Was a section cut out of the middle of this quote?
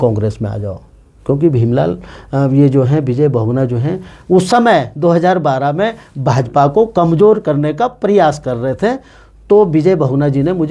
no; 0 cuts

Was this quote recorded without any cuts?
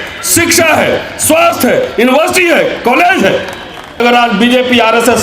no; 1 cut; at 4.0 s

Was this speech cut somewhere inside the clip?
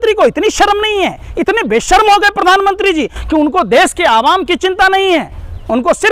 no; 0 cuts

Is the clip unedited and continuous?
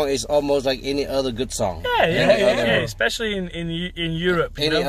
yes; 0 cuts

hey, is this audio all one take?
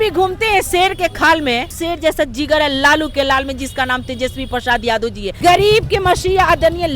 no; 2 cuts; at 1.8 s, 5.3 s

